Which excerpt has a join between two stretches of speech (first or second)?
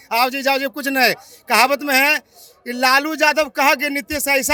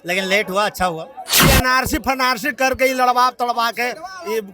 second